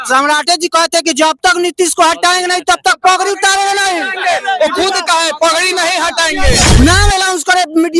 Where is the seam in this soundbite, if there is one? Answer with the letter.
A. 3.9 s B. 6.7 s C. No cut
B